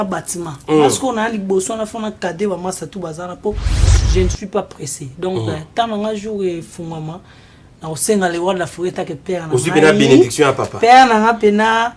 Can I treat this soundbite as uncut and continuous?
no; 1 cut; at 3.9 s

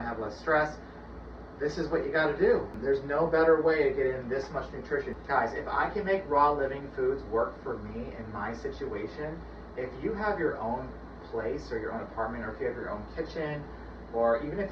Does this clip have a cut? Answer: yes; 2 cuts; at 2.7 s, 5.2 s

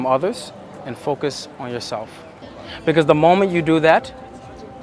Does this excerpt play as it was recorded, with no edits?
no; 1 cut; at 2.4 s

